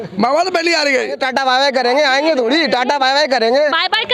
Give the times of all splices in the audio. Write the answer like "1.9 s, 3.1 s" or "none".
1.2 s